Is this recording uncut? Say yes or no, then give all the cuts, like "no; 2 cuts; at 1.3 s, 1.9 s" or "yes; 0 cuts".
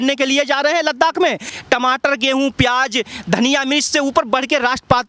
no; 1 cut; at 1.5 s